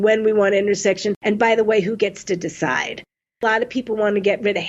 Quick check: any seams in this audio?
yes; 2 cuts; at 1.1 s, 3.4 s

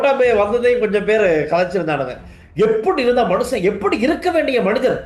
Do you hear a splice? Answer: no; 0 cuts

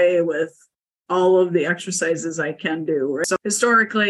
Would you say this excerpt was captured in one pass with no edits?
no; 1 cut; at 3.2 s

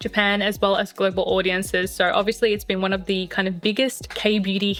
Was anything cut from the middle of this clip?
no; 0 cuts

